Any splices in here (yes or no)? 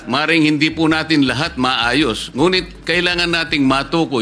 no